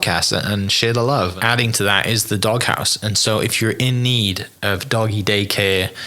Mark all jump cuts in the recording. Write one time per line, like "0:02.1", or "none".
0:01.4